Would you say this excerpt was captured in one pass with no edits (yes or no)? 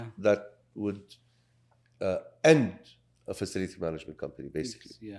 yes